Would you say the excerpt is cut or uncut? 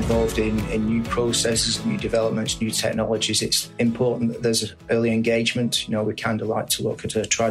uncut